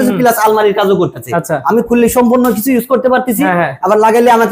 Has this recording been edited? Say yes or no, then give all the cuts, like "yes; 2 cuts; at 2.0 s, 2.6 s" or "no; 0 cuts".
no; 0 cuts